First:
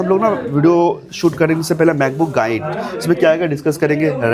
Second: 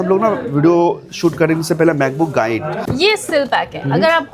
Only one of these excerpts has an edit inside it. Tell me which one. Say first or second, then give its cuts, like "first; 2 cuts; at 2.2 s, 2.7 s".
second; 1 cut; at 2.8 s